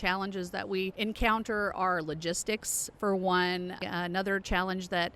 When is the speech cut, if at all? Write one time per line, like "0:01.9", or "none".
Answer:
0:00.9
0:03.8